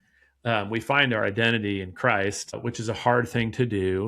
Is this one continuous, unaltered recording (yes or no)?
no